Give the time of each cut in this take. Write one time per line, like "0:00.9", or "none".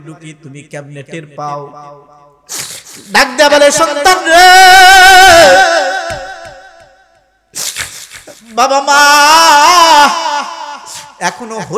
none